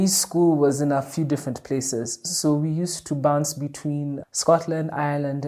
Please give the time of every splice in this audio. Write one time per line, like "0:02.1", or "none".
none